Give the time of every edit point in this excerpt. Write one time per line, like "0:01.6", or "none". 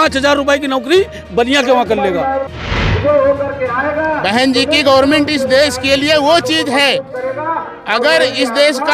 0:02.8